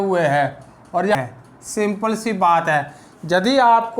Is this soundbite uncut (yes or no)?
no